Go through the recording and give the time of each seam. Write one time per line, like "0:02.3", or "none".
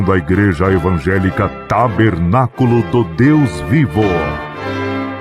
0:04.2